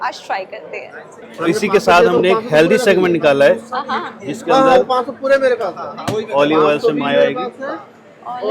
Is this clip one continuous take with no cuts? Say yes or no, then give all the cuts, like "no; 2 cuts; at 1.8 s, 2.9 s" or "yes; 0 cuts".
no; 1 cut; at 1.3 s